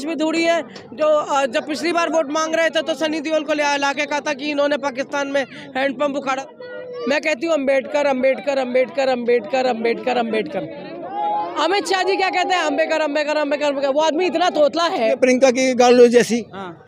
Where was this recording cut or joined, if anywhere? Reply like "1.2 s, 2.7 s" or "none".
6.4 s, 15.2 s